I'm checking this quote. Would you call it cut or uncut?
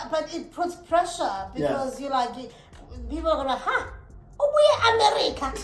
uncut